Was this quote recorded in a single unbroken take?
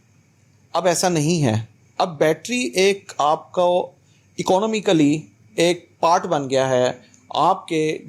yes; 0 cuts

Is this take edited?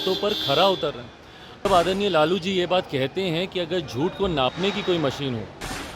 yes; 1 cut; at 1.7 s

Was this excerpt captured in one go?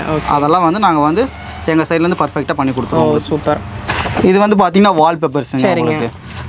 no; 1 cut; at 3.8 s

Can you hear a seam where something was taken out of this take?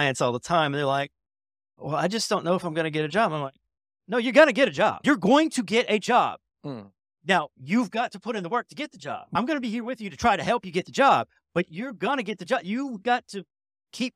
no; 0 cuts

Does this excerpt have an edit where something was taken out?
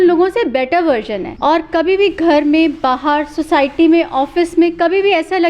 yes; 1 cut; at 1.2 s

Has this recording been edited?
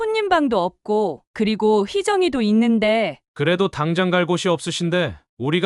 yes; 1 cut; at 3.2 s

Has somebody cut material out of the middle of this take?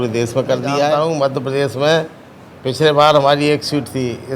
yes; 1 cut; at 0.9 s

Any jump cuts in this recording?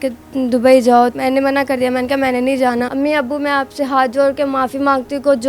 yes; 2 cuts; at 1.1 s, 2.9 s

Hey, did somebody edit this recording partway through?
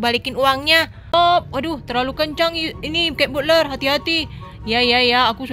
yes; 1 cut; at 1.1 s

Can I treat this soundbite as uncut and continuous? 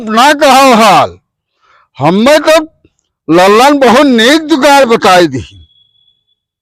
yes; 0 cuts

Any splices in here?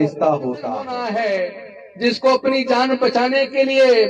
yes; 1 cut; at 0.9 s

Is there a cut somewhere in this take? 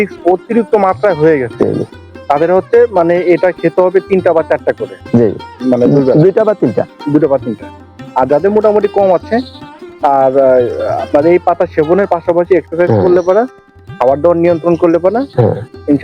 no; 0 cuts

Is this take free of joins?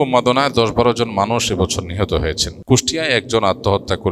no; 1 cut; at 2.5 s

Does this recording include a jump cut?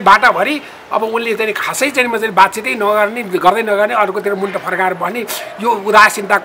no; 0 cuts

